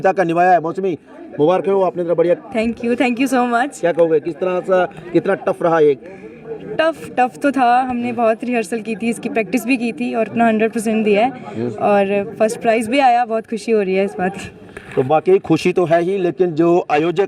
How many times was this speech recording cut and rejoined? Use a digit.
0